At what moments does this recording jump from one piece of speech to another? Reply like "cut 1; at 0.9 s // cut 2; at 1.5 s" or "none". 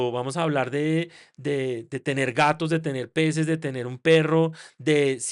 none

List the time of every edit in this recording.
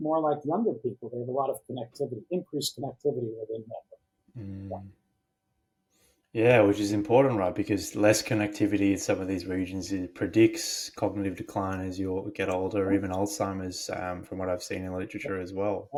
none

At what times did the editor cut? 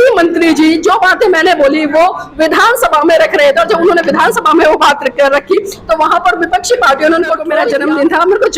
cut 1; at 7.6 s

